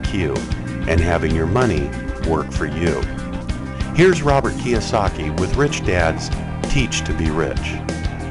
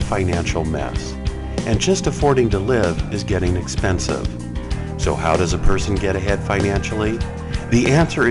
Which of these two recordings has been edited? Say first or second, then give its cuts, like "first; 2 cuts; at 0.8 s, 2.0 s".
second; 1 cut; at 4.5 s